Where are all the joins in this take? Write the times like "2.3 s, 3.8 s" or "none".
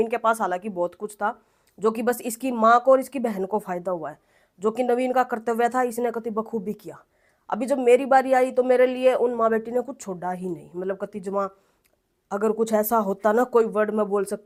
none